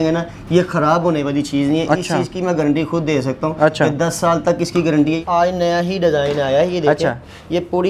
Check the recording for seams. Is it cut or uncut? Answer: cut